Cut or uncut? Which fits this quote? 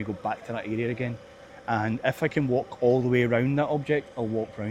uncut